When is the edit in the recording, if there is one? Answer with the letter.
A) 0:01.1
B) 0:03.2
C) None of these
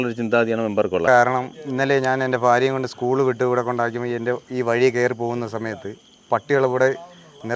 A